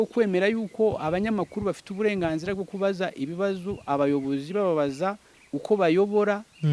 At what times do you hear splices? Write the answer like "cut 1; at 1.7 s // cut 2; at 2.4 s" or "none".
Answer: none